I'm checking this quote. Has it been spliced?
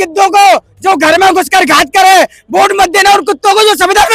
no; 0 cuts

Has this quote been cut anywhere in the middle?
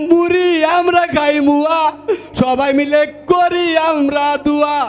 no; 0 cuts

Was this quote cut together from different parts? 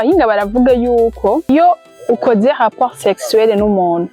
yes; 1 cut; at 1.5 s

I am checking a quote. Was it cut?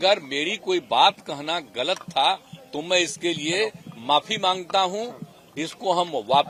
no; 0 cuts

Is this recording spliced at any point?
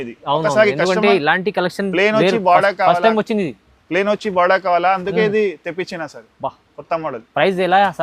no; 0 cuts

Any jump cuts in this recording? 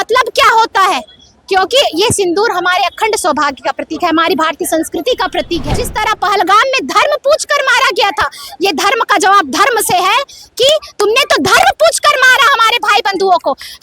yes; 1 cut; at 5.8 s

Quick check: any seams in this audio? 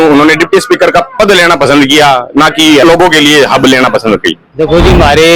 yes; 1 cut; at 4.4 s

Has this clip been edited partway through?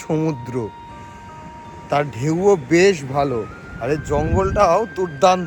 no; 0 cuts

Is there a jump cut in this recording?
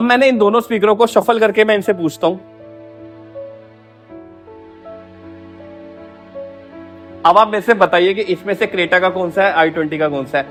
no; 0 cuts

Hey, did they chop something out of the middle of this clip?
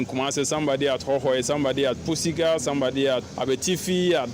yes; 1 cut; at 3.2 s

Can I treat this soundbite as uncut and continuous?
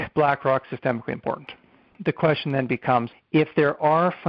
no; 2 cuts; at 1.9 s, 3.2 s

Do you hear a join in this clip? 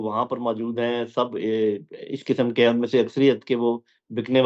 no; 0 cuts

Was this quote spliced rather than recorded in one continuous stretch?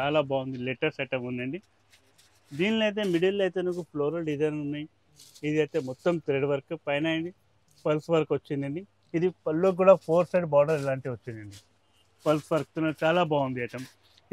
no; 0 cuts

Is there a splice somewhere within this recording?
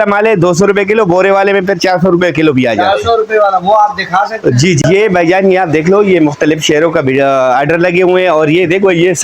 yes; 1 cut; at 4.8 s

